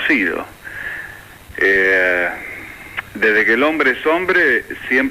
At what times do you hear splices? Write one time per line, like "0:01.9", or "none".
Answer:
0:01.9